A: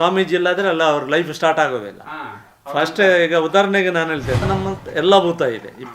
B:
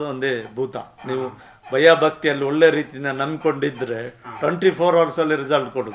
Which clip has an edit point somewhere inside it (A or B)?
A